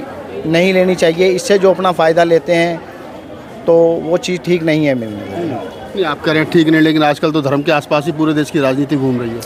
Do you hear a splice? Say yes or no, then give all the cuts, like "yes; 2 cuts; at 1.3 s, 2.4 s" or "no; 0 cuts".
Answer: no; 0 cuts